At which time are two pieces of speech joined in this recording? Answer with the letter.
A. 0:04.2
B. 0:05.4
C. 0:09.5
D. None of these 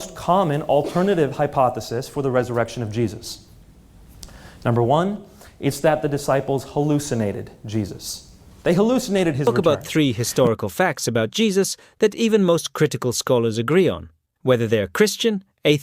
C